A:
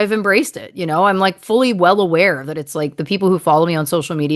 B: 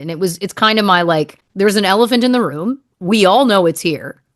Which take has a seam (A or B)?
B